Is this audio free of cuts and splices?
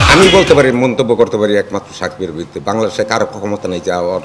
yes; 0 cuts

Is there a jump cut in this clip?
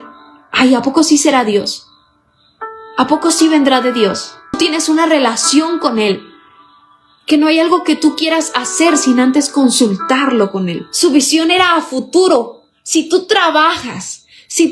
yes; 2 cuts; at 4.6 s, 11.1 s

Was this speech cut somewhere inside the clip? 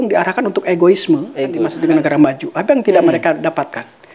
yes; 1 cut; at 1.7 s

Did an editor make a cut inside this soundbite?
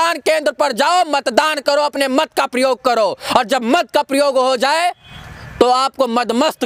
no; 0 cuts

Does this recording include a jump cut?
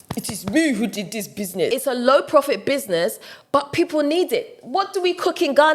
yes; 1 cut; at 1.7 s

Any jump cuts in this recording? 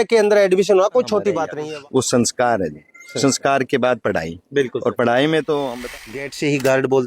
yes; 2 cuts; at 1.5 s, 5.7 s

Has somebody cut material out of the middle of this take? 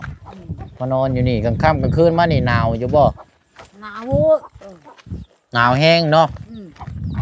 no; 0 cuts

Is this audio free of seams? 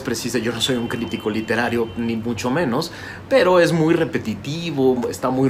yes; 0 cuts

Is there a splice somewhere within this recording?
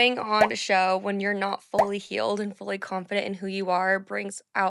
no; 0 cuts

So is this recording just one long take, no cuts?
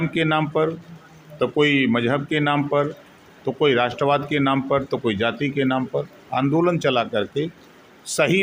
yes; 0 cuts

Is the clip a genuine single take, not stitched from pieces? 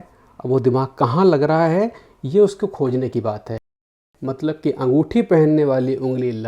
no; 1 cut; at 3.7 s

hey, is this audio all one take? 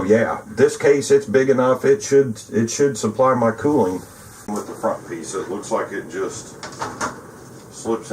no; 1 cut; at 4.5 s

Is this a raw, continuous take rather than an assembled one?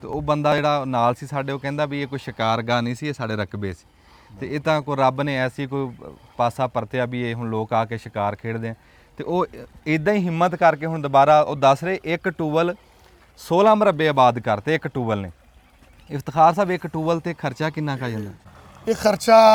yes; 0 cuts

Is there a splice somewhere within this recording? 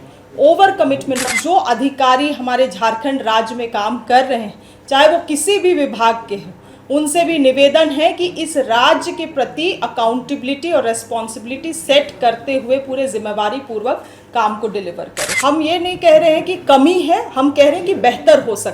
yes; 2 cuts; at 1.3 s, 15.3 s

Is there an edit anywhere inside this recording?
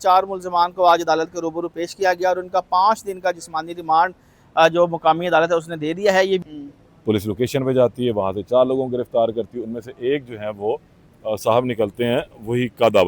yes; 1 cut; at 6.5 s

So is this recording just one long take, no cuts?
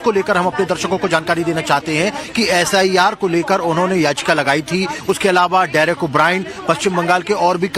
yes; 0 cuts

